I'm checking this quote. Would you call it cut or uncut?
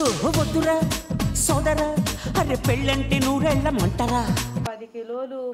cut